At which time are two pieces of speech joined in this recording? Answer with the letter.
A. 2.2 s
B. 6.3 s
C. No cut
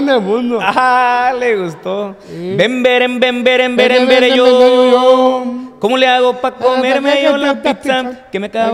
C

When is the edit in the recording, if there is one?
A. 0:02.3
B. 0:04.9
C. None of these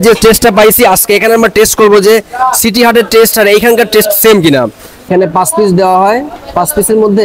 B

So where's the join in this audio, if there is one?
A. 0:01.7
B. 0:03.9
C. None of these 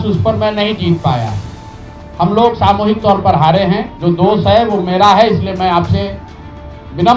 B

